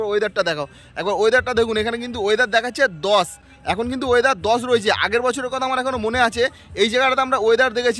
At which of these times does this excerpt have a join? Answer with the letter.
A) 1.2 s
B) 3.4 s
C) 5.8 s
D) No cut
D